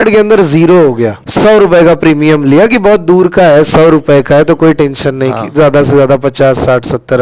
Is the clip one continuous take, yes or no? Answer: no